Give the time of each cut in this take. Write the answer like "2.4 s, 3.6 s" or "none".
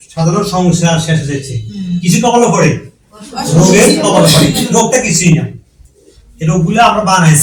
none

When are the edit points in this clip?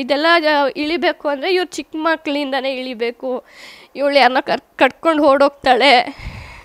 none

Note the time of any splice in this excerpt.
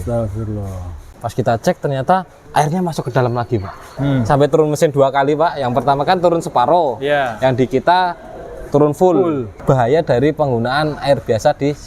1.2 s, 2.4 s, 3.9 s, 9.6 s

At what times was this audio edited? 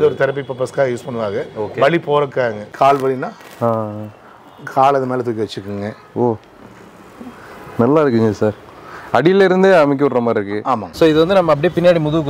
2.7 s, 10.8 s

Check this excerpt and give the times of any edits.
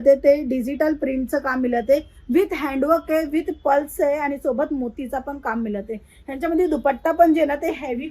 none

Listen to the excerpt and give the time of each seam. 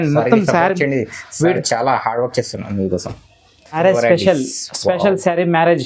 3.8 s

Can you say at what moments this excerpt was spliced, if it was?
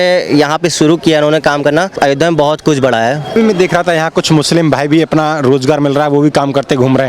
1.9 s, 3.3 s

